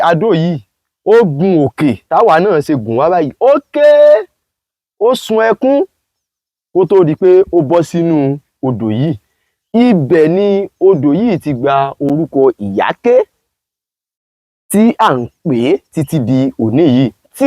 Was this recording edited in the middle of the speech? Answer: no; 0 cuts

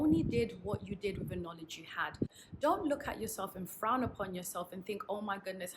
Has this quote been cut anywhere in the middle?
yes; 1 cut; at 2.3 s

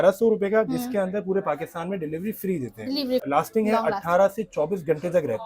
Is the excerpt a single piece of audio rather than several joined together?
no; 1 cut; at 3.4 s

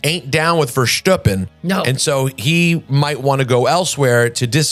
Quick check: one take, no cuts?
yes; 0 cuts

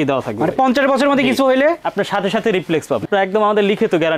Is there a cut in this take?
yes; 1 cut; at 3.0 s

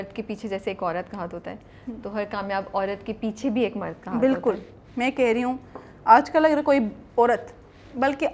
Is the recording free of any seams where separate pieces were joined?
yes; 0 cuts

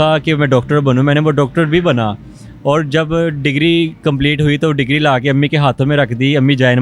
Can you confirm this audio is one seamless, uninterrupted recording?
yes; 0 cuts

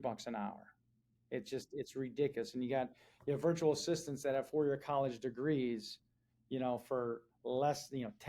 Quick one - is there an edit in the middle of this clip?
no; 0 cuts

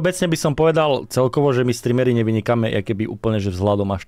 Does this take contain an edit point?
no; 0 cuts

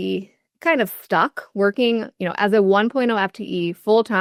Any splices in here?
no; 0 cuts

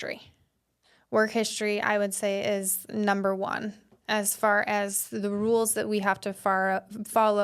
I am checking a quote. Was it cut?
no; 0 cuts

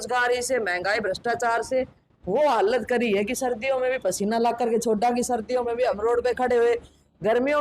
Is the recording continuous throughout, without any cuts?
yes; 0 cuts

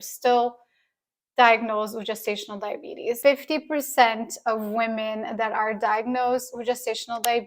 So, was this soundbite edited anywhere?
yes; 1 cut; at 3.2 s

